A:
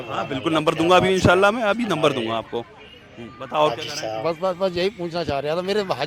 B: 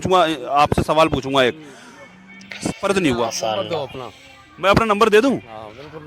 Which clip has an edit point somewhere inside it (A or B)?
B